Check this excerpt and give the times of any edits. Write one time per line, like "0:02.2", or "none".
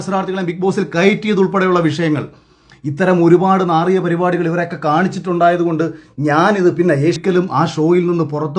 0:07.2